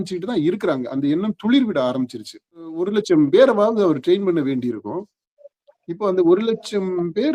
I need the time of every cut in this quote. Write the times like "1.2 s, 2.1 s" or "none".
2.8 s